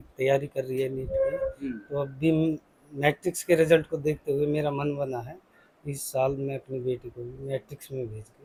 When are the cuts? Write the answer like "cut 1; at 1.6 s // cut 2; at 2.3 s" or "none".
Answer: none